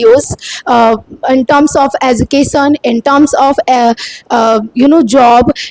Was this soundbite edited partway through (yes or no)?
no